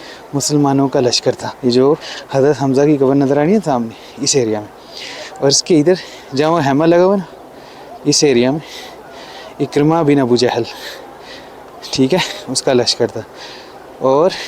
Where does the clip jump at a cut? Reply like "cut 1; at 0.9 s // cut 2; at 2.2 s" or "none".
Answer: cut 1; at 1.5 s // cut 2; at 2.1 s